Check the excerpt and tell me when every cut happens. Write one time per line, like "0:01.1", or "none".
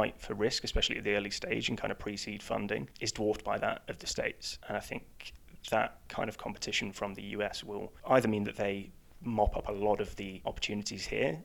0:03.0
0:04.5
0:10.4